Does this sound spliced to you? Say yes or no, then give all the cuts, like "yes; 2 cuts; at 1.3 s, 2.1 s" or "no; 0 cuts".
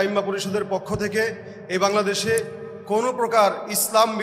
no; 0 cuts